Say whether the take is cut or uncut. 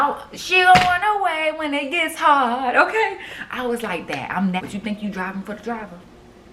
cut